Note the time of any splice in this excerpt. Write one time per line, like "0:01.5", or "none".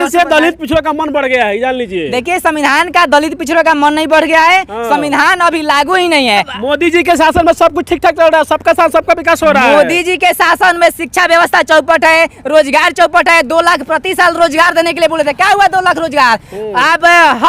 0:06.5